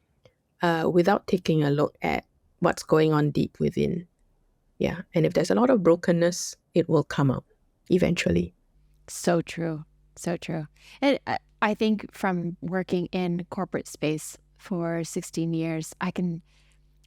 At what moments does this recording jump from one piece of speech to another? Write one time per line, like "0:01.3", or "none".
none